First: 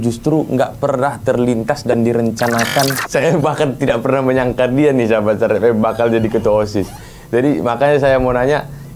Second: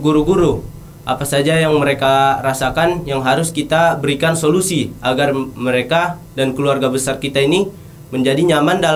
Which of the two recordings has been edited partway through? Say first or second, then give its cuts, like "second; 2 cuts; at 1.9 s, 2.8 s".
first; 1 cut; at 3.0 s